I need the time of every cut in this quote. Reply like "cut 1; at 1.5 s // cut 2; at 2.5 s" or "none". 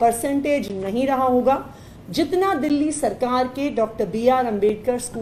none